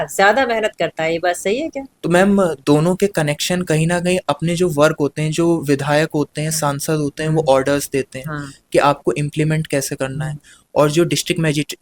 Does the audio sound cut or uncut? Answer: cut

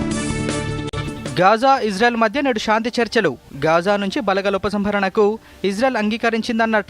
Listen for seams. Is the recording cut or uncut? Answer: cut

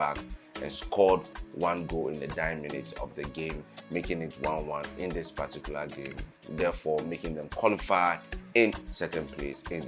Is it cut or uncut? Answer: uncut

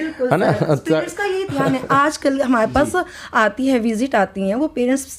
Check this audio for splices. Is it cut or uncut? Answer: uncut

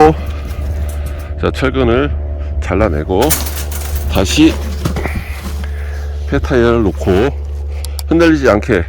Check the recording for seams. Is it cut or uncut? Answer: uncut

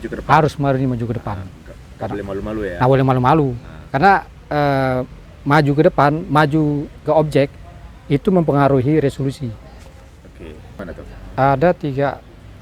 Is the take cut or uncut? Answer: cut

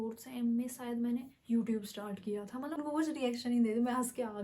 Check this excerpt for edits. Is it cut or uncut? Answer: cut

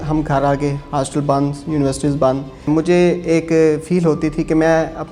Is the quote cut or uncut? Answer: cut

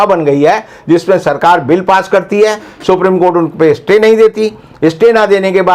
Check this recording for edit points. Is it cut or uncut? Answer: uncut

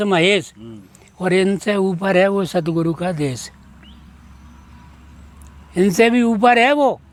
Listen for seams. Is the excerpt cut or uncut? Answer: uncut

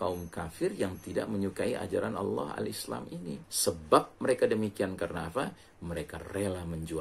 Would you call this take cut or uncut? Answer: cut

